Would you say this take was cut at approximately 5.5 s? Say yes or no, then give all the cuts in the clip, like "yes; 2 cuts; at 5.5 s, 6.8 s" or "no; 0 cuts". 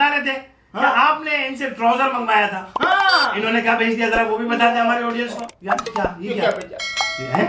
yes; 1 cut; at 5.5 s